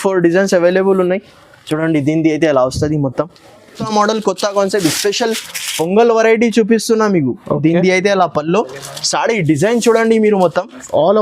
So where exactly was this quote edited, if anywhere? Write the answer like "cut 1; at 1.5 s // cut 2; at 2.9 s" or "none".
cut 1; at 3.8 s